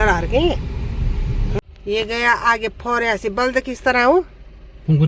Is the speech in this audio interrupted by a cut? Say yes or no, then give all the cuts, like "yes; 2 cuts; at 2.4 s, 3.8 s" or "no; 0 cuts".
yes; 1 cut; at 1.6 s